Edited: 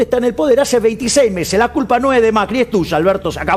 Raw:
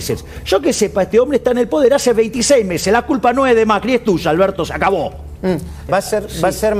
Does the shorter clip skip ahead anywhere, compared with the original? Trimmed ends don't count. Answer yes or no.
no